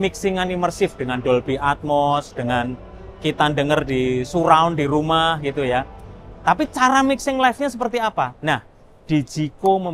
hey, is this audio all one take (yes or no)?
yes